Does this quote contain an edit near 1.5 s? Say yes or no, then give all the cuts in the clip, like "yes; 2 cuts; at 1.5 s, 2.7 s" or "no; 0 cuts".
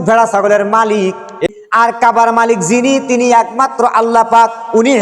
yes; 1 cut; at 1.5 s